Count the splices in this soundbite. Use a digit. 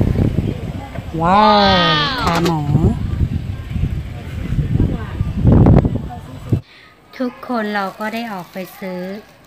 1